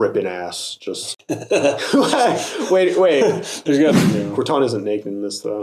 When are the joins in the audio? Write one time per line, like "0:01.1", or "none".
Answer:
0:03.9